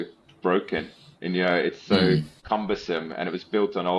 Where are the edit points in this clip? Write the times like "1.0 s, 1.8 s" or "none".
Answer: 2.3 s